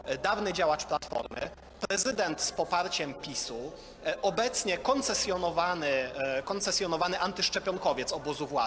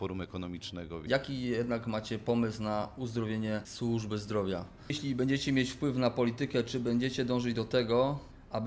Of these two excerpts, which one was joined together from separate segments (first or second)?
second